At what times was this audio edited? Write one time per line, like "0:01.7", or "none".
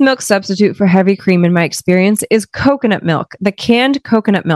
none